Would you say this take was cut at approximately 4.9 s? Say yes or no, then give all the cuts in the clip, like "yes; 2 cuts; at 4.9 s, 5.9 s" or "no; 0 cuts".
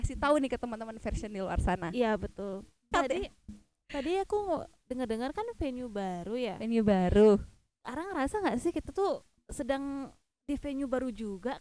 no; 1 cut; at 2.9 s